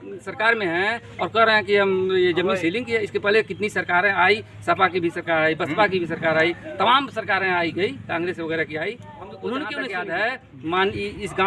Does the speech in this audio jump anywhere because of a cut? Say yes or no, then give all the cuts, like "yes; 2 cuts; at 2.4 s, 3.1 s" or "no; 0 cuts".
yes; 1 cut; at 9.9 s